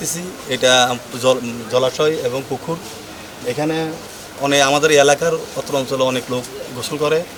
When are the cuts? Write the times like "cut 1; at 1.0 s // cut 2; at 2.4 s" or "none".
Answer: none